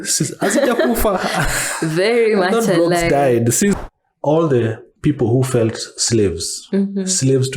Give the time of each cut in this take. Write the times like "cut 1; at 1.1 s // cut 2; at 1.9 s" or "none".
cut 1; at 3.8 s